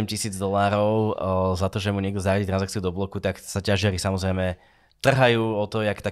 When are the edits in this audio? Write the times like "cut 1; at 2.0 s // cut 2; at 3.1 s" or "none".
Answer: none